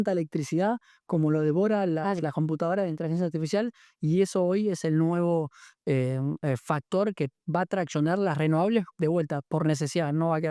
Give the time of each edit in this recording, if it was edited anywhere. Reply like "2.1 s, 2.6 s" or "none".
none